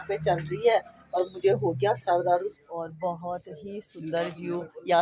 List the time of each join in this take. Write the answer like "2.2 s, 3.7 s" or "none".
2.5 s